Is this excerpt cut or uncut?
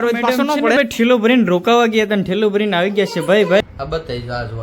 cut